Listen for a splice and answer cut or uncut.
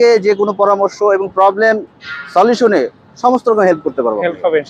uncut